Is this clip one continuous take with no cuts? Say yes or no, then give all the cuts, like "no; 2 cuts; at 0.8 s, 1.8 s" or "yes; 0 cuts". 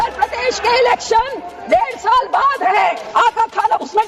no; 1 cut; at 3.0 s